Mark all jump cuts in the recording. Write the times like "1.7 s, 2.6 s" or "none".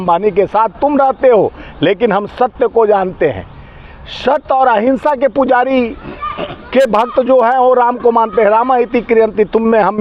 none